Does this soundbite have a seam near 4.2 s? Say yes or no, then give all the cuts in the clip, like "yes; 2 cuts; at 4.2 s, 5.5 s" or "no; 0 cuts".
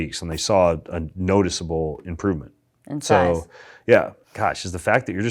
yes; 1 cut; at 4.2 s